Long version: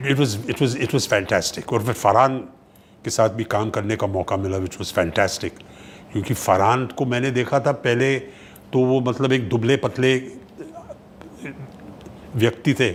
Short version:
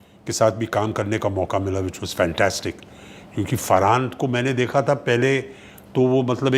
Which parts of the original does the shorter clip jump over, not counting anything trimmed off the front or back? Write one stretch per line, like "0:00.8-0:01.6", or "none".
none

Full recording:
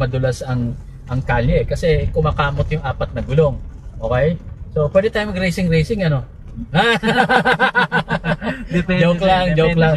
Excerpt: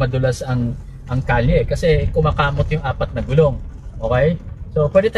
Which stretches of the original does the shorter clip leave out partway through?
none

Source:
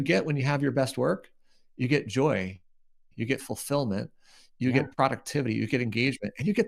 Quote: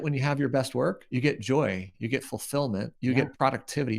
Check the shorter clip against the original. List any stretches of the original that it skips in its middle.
0:01.3-0:01.7
0:02.6-0:03.1
0:04.1-0:04.5

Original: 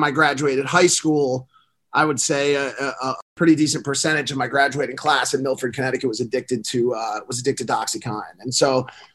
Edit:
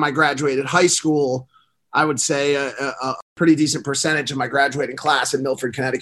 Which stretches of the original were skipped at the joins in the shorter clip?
none

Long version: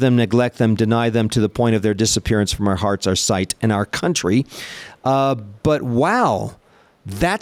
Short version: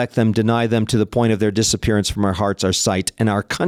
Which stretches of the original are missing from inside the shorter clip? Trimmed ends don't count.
none

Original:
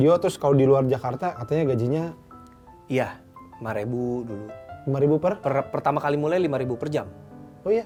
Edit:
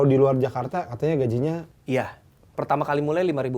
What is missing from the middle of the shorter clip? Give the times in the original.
0:02.2-0:02.7
0:03.6-0:05.7

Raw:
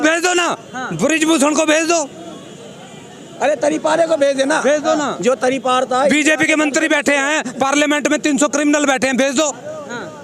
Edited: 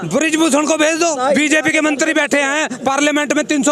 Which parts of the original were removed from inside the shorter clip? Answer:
0:02.1-0:05.9

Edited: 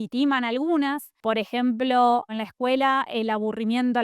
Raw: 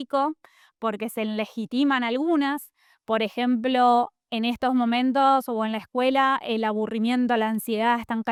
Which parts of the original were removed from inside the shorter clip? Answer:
0:02.7-0:02.9
0:04.2-0:05.7

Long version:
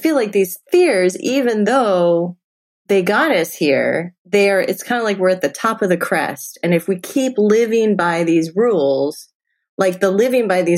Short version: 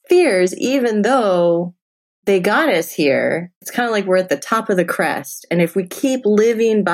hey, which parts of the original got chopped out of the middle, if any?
0:04.2-0:04.7

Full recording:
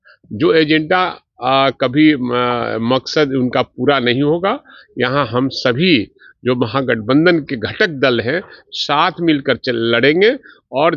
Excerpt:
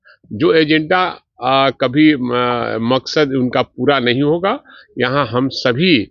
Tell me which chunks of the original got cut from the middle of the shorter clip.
none

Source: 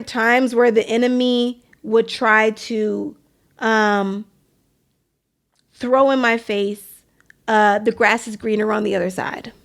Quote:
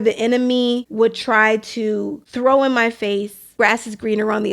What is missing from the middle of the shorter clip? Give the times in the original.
0:01.6-0:01.8
0:03.2-0:05.7
0:07.0-0:08.0

